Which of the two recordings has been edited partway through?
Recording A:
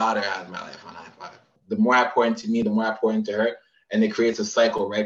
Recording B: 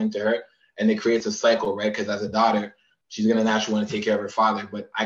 A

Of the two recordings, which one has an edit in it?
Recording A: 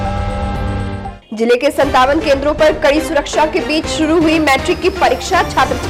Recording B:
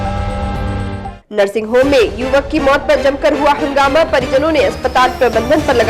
B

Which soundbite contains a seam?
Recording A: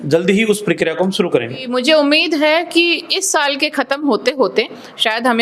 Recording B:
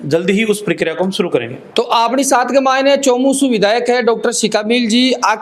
A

